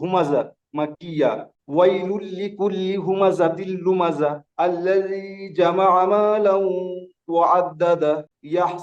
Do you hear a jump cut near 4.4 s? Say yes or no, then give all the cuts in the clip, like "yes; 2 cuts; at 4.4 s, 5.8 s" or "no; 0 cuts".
no; 0 cuts